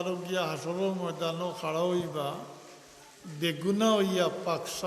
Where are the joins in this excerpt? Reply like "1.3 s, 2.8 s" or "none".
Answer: none